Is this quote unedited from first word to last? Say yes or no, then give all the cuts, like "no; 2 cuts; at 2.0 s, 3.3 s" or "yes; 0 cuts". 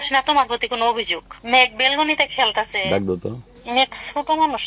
no; 1 cut; at 1.3 s